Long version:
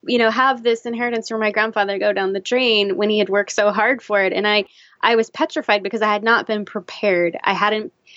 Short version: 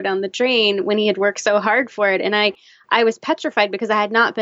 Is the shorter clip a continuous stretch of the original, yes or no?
yes